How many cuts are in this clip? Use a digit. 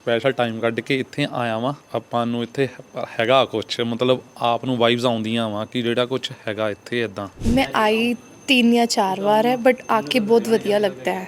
2